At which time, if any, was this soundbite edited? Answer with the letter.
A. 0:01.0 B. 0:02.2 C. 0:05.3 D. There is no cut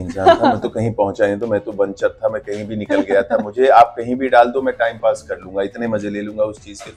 D